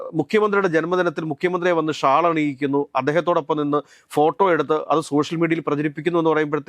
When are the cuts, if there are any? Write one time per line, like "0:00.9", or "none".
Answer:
none